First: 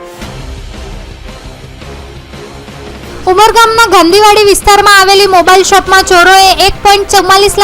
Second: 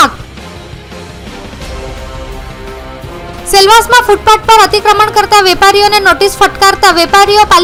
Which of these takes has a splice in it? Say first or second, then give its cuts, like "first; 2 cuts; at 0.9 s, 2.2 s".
first; 1 cut; at 3.1 s